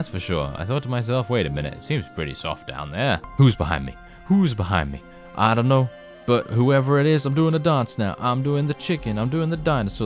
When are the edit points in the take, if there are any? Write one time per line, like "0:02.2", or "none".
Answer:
0:03.3